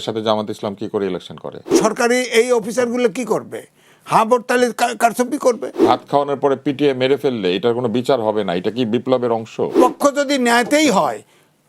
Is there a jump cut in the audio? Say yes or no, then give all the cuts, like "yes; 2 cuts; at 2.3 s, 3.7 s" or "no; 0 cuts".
yes; 3 cuts; at 1.7 s, 5.8 s, 9.7 s